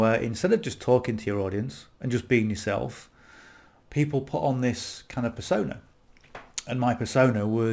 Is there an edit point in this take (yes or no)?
no